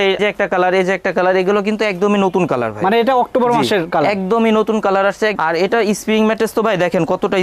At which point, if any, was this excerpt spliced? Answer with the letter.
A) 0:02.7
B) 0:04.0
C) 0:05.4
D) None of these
C